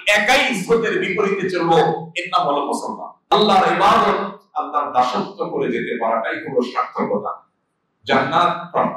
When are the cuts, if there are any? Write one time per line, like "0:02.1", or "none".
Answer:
0:03.1